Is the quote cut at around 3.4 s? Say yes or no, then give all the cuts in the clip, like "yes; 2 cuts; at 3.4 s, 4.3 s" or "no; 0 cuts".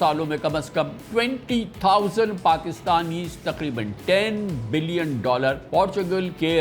no; 2 cuts; at 1.0 s, 5.6 s